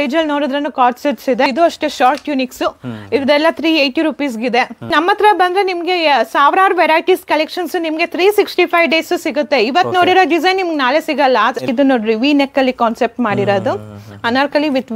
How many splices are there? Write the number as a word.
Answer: three